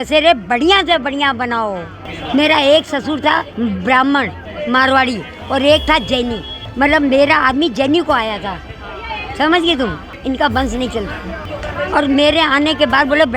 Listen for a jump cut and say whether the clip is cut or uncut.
cut